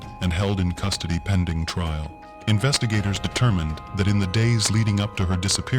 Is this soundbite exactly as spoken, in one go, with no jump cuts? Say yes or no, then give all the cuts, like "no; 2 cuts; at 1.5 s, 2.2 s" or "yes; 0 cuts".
yes; 0 cuts